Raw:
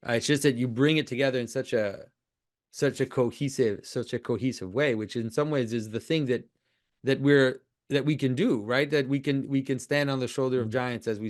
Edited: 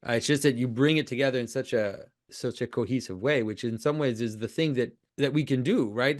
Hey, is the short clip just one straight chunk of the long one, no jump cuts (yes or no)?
no